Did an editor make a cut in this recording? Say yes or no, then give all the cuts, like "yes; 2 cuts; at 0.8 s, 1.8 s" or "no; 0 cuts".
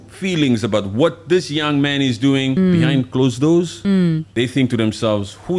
yes; 2 cuts; at 2.6 s, 4.0 s